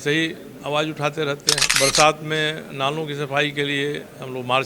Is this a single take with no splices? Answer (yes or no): no